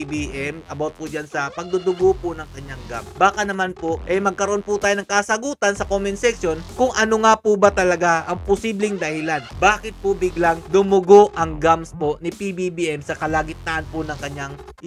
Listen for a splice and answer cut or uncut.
uncut